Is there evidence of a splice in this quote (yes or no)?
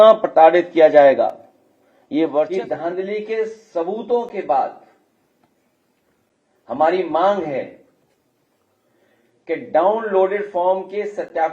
yes